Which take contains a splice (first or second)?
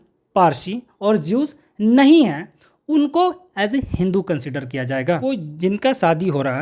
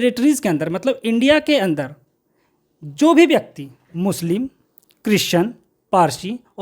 first